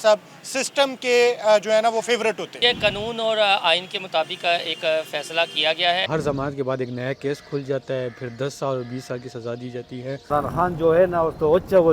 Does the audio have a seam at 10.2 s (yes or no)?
yes